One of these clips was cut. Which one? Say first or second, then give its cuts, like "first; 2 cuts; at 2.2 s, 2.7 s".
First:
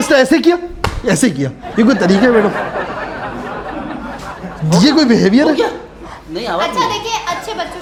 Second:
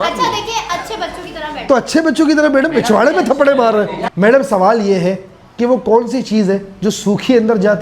second; 1 cut; at 4.0 s